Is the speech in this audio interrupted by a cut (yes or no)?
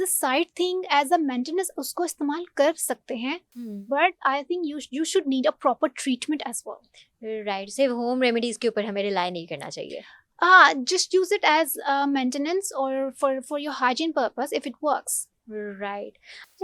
no